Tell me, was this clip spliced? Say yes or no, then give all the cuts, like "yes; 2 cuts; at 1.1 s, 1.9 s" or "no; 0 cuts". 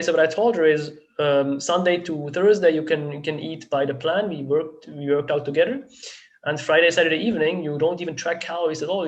no; 0 cuts